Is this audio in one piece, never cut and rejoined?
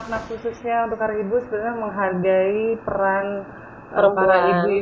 yes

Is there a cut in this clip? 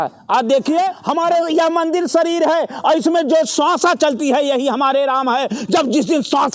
yes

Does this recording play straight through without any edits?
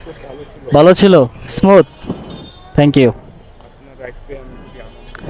yes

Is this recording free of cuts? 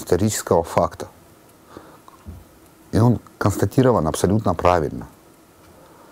yes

